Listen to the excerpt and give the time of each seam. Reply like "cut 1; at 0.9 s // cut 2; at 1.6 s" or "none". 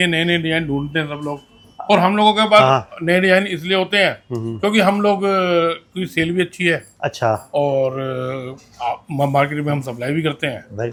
none